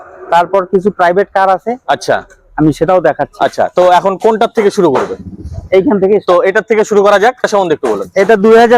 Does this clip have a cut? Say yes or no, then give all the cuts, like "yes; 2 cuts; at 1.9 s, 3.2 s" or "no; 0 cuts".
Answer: no; 0 cuts